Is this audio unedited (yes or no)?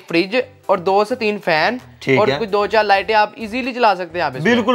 yes